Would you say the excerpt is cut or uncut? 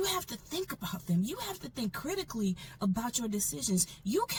uncut